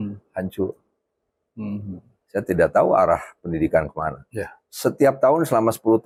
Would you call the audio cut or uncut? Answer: uncut